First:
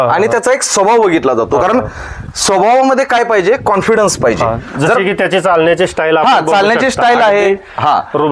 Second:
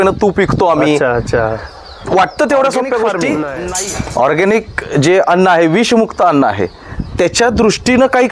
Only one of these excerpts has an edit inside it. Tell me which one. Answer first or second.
second